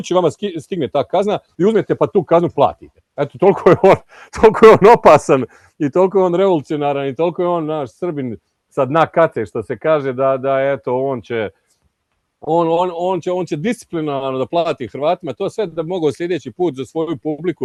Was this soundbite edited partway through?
no; 0 cuts

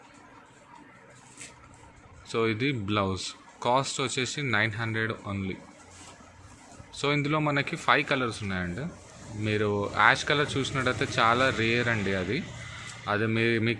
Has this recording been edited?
no; 0 cuts

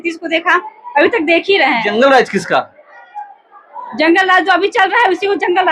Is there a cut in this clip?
no; 0 cuts

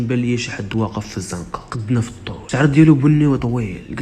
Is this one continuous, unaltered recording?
no; 2 cuts; at 1.7 s, 2.4 s

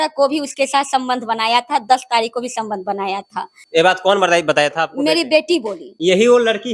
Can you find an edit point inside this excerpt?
yes; 2 cuts; at 3.6 s, 5.8 s

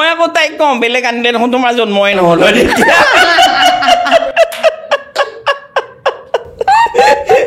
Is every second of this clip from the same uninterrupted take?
yes; 0 cuts

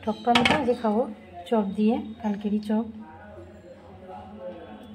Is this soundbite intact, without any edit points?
yes; 0 cuts

